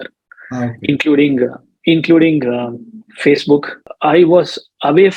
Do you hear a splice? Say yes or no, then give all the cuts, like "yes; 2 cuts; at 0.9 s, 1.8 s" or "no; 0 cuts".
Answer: yes; 1 cut; at 3.8 s